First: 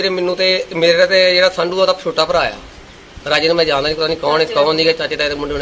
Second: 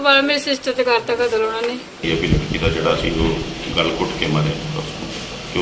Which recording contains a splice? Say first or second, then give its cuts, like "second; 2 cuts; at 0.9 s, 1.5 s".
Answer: second; 1 cut; at 2.0 s